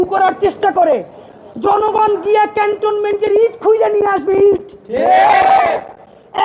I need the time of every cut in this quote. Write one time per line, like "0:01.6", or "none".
none